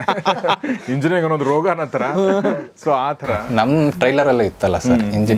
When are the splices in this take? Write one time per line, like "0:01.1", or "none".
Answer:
none